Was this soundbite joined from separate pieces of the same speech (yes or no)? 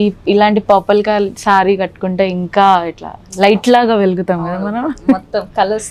no